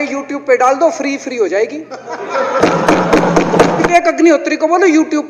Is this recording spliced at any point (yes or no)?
yes